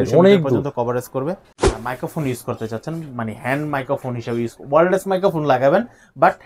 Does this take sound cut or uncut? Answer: cut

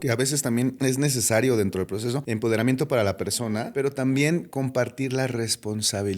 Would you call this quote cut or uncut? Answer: cut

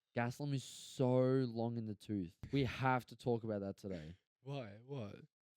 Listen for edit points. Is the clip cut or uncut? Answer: cut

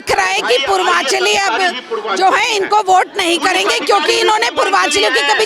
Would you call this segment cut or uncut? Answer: uncut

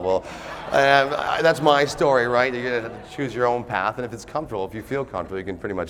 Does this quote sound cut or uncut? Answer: uncut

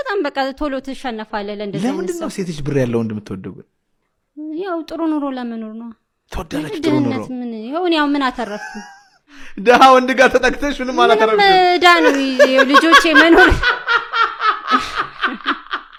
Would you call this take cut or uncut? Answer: uncut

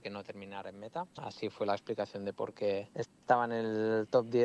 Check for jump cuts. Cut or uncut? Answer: cut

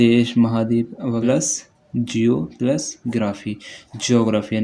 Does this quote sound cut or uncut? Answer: cut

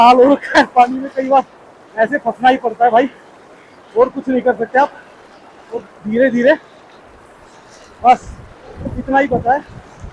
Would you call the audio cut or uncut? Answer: uncut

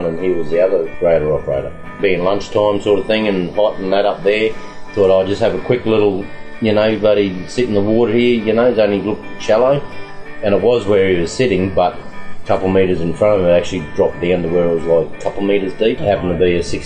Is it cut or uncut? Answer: cut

